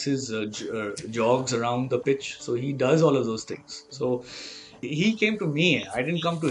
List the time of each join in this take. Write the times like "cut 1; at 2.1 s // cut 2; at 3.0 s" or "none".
cut 1; at 4.9 s